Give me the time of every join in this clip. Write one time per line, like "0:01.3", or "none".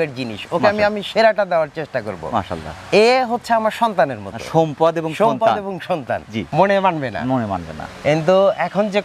0:06.4